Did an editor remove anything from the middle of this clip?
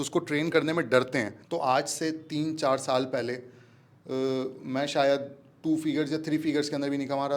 yes; 1 cut; at 1.4 s

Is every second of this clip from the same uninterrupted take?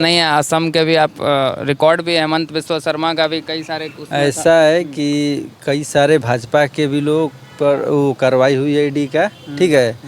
yes; 0 cuts

